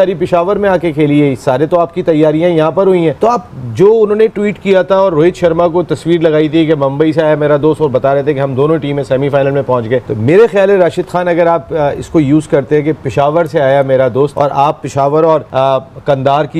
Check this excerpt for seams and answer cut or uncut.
uncut